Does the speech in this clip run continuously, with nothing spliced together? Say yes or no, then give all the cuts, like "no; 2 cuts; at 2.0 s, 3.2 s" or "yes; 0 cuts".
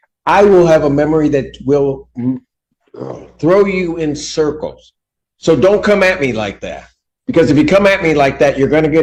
yes; 0 cuts